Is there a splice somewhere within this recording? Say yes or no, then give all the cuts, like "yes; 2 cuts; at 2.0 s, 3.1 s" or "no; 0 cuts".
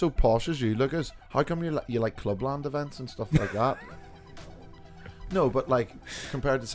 no; 0 cuts